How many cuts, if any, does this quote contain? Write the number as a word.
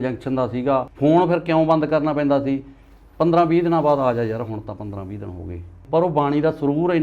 two